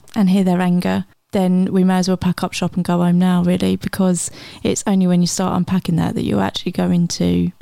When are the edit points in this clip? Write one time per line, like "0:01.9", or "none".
none